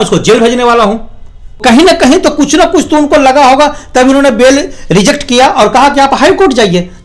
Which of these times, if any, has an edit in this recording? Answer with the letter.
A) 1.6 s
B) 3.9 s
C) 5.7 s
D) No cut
A